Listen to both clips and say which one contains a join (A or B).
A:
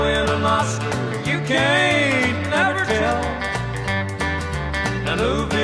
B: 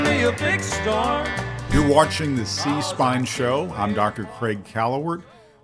B